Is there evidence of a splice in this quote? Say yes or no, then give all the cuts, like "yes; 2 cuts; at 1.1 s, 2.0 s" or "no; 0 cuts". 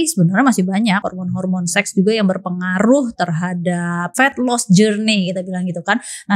yes; 2 cuts; at 1.1 s, 4.2 s